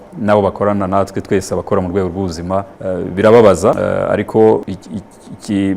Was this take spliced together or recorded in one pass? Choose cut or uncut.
cut